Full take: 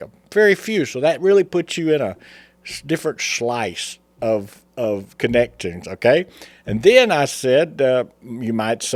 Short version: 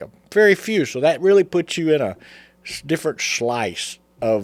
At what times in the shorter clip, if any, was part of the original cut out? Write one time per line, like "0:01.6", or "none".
none